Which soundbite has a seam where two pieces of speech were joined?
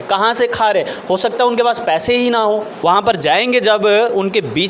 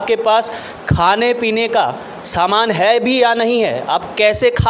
first; 1 cut; at 2.7 s

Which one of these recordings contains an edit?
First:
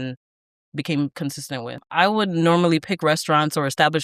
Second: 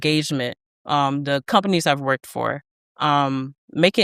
first; 1 cut; at 1.8 s

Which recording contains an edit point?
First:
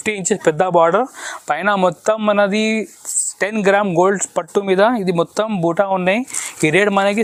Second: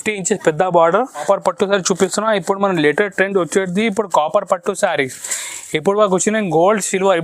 second; 1 cut; at 1.2 s

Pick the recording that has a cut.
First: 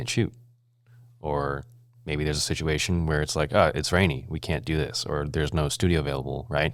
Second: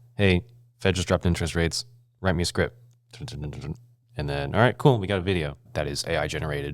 second; 1 cut; at 5.6 s

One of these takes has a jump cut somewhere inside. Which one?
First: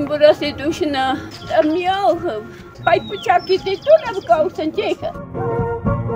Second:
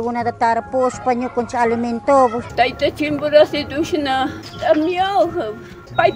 first; 1 cut; at 5.2 s

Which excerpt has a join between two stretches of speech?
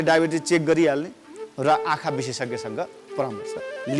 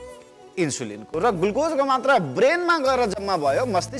second; 1 cut; at 1.1 s

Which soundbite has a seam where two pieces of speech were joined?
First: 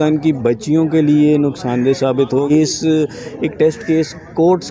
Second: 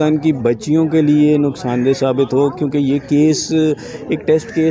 first; 1 cut; at 2.5 s

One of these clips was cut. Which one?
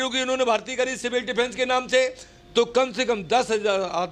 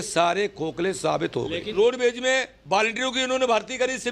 second; 1 cut; at 1.7 s

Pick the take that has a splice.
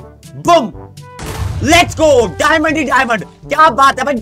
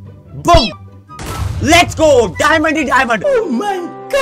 first; 1 cut; at 3.2 s

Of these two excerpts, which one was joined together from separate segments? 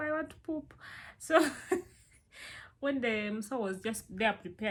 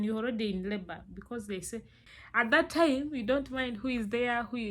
second; 1 cut; at 2.0 s

